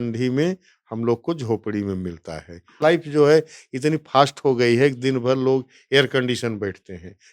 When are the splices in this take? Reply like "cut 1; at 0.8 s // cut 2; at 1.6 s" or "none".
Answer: cut 1; at 2.8 s